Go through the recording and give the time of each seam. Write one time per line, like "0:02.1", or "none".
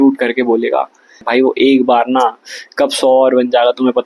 0:01.2